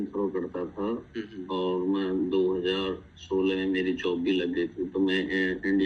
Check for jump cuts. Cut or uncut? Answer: uncut